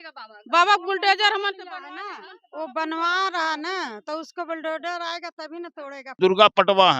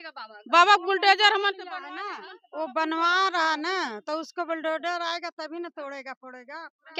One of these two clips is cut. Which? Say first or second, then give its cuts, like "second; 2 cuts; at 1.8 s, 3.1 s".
first; 1 cut; at 6.0 s